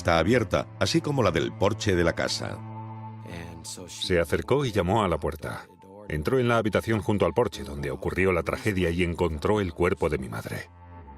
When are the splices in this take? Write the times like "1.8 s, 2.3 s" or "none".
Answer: 6.0 s